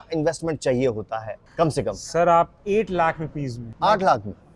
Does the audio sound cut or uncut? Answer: cut